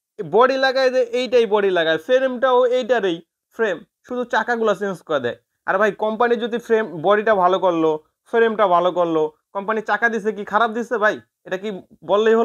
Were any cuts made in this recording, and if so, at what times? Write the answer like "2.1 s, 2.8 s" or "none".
none